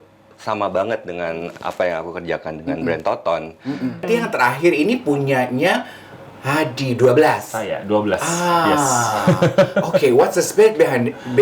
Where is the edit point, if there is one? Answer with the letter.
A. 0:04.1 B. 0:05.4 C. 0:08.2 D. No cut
A